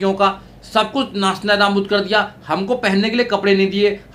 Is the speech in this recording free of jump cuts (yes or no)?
yes